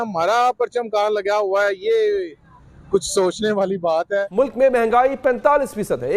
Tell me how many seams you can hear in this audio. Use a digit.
1